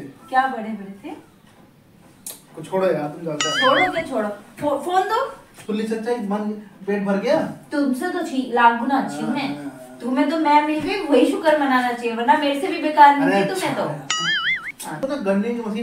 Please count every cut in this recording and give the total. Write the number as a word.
two